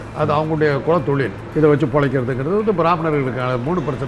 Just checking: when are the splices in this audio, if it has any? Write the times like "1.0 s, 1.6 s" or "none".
1.4 s